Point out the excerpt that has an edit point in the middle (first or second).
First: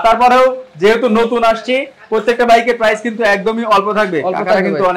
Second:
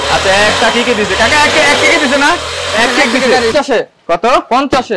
second